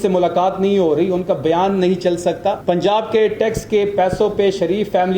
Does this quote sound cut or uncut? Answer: cut